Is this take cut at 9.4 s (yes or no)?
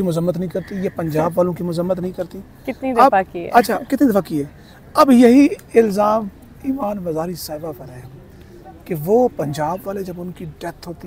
no